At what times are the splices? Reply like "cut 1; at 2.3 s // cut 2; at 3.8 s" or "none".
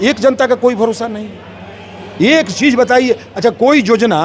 none